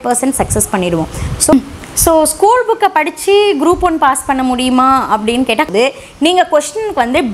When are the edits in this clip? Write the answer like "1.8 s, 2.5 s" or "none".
1.5 s, 5.7 s